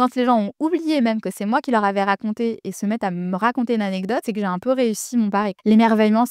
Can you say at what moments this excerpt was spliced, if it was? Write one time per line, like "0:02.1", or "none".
none